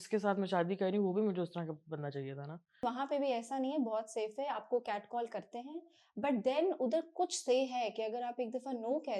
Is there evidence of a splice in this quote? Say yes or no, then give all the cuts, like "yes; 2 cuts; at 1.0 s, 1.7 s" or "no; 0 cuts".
yes; 1 cut; at 2.8 s